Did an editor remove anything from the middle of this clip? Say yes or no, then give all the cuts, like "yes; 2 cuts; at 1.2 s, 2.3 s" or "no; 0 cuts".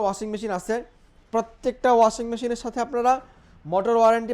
no; 0 cuts